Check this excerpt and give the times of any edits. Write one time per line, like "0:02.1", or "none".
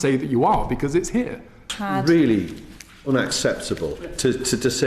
0:01.7

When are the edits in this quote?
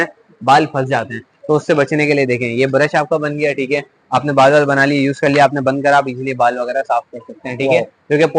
none

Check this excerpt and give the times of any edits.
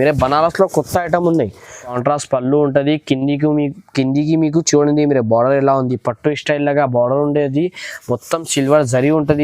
0:01.9

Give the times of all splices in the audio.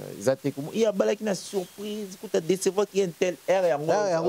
none

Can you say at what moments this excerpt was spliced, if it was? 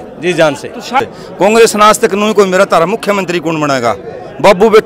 0:01.0

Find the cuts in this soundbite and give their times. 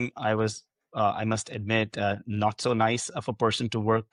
none

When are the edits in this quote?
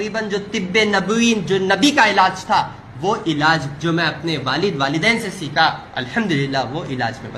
0:05.9

